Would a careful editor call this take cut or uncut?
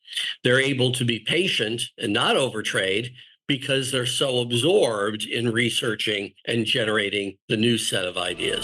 cut